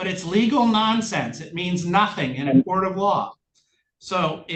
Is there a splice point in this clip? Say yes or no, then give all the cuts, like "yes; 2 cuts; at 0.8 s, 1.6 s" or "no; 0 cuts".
no; 0 cuts